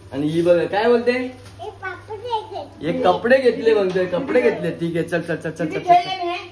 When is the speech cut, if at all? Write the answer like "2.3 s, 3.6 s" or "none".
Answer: none